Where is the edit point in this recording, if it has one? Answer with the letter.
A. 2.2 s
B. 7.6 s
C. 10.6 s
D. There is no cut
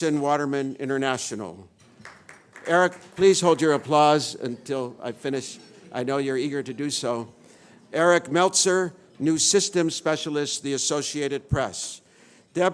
C